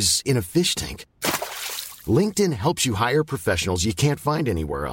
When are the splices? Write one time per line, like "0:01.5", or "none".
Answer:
none